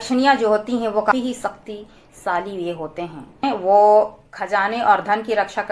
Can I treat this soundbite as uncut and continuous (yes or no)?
no